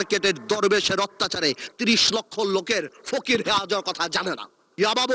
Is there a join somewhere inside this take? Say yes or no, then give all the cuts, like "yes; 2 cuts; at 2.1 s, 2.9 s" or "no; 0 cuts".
no; 0 cuts